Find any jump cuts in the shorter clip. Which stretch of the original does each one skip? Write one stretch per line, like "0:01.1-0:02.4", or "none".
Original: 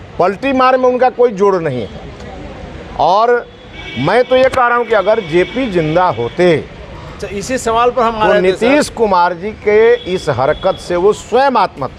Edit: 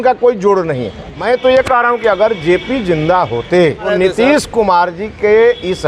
0:02.0-0:03.9
0:06.7-0:08.3